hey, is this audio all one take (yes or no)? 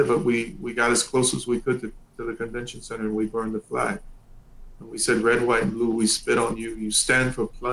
yes